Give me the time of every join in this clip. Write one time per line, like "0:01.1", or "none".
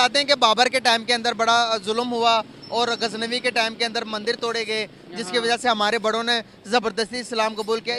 none

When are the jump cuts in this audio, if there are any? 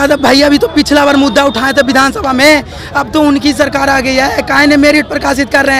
none

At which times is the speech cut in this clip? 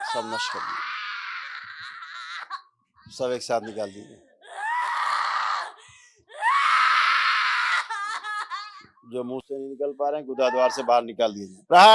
none

